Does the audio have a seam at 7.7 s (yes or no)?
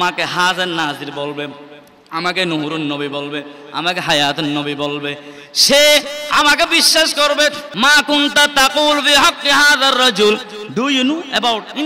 yes